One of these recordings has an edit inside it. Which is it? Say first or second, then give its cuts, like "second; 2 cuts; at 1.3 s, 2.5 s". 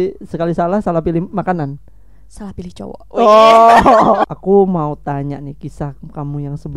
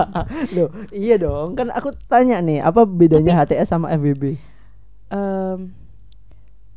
first; 1 cut; at 4.3 s